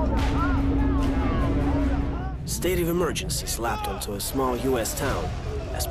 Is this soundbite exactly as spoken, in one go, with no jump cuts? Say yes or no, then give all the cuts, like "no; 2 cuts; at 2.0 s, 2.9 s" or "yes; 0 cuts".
no; 1 cut; at 1.9 s